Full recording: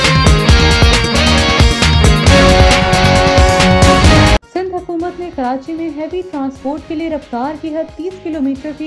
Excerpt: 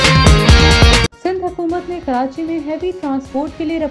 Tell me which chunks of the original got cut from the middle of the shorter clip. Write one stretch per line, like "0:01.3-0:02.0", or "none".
0:01.1-0:04.4